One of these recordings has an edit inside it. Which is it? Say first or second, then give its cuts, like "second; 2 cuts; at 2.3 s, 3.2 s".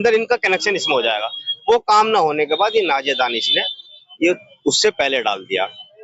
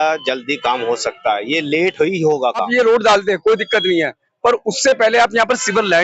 second; 1 cut; at 2.6 s